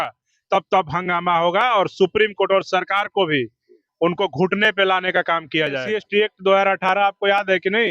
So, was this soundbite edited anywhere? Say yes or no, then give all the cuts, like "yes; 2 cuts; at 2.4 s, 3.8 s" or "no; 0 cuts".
yes; 1 cut; at 5.9 s